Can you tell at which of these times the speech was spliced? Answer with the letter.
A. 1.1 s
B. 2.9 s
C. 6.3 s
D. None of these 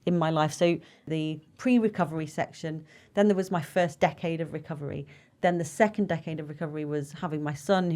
A